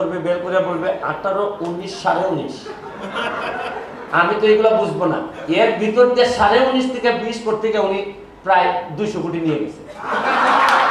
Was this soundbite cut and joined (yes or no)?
no